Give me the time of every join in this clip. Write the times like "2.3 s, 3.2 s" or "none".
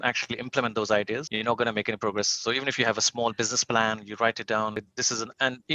1.3 s, 4.8 s